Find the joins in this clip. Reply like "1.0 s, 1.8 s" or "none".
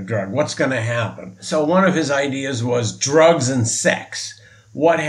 1.4 s